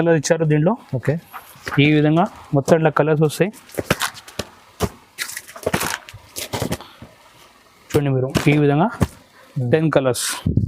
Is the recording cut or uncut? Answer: uncut